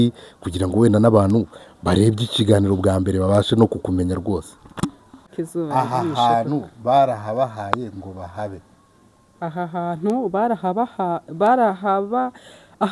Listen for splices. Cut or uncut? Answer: cut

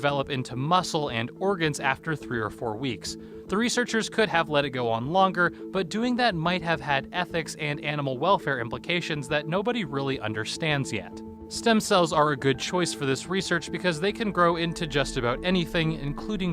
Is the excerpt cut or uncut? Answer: cut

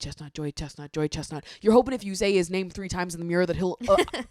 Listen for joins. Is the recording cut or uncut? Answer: uncut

